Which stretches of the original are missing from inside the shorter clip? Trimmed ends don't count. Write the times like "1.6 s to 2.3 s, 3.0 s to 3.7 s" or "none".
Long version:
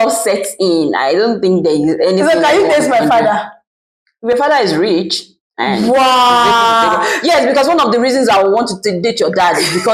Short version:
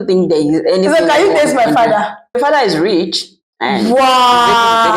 3.7 s to 4.3 s